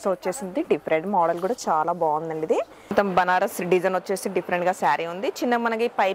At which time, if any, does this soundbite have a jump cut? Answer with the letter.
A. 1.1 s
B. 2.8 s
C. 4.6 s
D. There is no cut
B